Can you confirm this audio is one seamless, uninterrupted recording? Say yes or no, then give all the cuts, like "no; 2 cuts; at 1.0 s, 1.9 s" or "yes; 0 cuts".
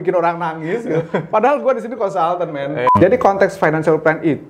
no; 1 cut; at 2.9 s